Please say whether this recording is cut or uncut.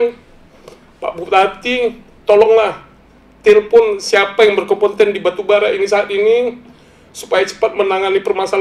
uncut